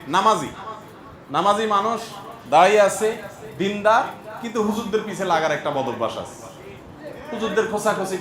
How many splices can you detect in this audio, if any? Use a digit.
0